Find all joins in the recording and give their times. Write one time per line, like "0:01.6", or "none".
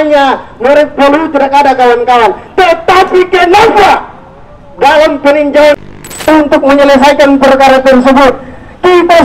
0:06.1